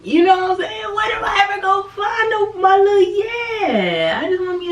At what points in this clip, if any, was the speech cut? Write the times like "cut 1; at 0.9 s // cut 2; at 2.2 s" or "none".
none